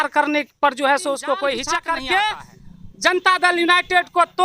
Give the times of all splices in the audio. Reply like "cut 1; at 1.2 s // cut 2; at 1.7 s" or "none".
cut 1; at 1.7 s

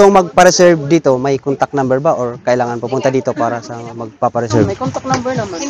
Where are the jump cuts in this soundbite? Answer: none

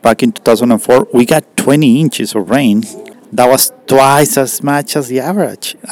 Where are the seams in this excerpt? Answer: cut 1; at 3.0 s

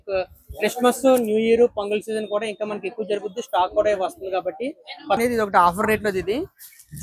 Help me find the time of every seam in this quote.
cut 1; at 5.2 s

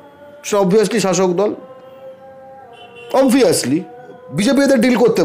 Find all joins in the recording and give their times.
cut 1; at 4.2 s

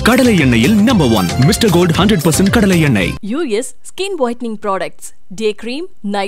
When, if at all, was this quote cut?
none

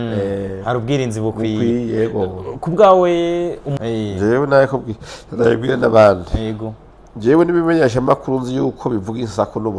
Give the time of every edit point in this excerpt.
cut 1; at 3.8 s

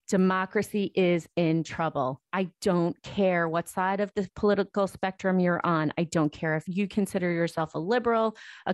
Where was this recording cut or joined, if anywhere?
cut 1; at 4.3 s

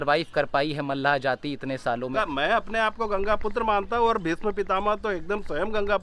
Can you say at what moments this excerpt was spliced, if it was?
cut 1; at 2.1 s

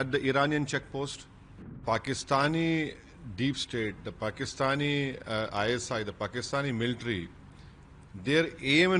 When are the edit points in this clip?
cut 1; at 1.8 s

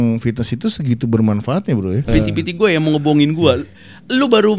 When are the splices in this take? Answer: cut 1; at 2.1 s

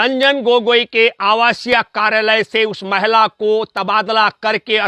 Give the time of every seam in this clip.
none

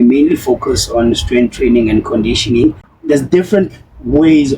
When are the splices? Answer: cut 1; at 2.9 s

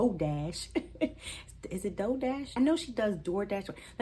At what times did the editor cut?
cut 1; at 2.6 s

